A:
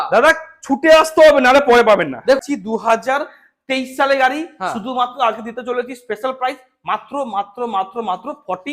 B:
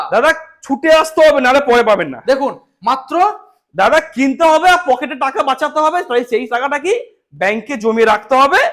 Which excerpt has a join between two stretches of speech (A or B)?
A